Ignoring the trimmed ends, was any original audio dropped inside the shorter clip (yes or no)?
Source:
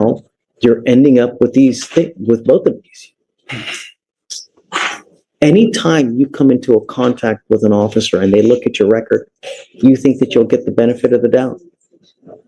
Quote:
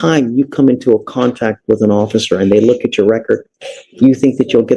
no